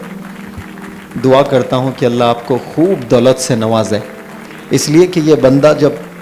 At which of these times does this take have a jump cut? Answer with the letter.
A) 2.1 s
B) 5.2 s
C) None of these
C